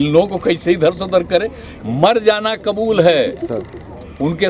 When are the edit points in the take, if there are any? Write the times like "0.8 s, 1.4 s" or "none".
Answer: 1.6 s